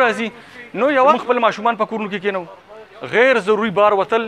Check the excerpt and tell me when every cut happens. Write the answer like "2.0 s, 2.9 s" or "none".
1.1 s